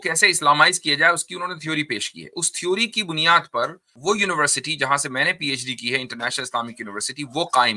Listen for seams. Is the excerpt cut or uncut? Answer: cut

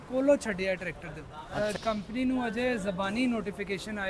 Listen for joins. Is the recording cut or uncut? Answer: cut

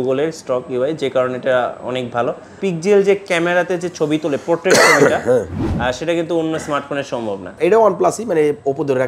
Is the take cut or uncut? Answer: cut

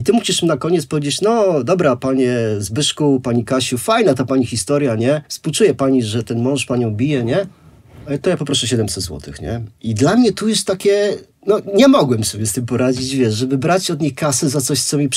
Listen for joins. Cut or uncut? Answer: uncut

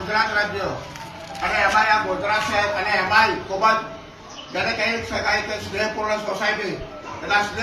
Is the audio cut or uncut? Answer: cut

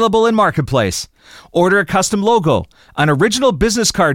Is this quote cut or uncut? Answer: uncut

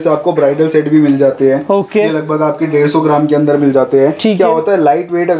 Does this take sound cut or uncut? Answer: uncut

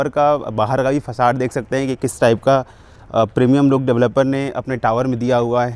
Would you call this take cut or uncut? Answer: uncut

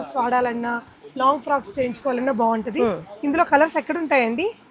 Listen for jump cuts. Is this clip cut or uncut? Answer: uncut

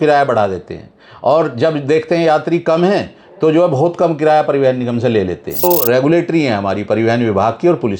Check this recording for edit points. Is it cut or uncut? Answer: cut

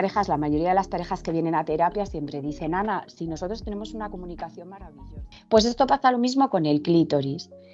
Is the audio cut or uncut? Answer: cut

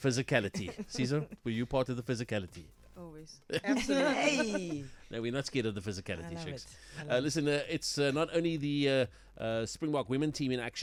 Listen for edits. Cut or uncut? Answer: uncut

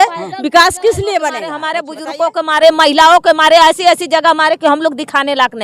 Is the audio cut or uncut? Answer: cut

